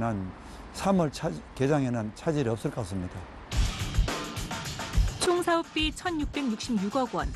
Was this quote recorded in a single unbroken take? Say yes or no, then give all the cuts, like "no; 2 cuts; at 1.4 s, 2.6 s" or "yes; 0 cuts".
no; 1 cut; at 4.3 s